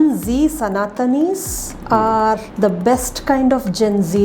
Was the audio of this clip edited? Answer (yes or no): yes